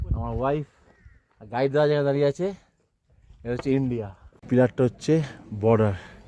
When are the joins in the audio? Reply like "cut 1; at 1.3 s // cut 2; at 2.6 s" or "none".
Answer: cut 1; at 4.5 s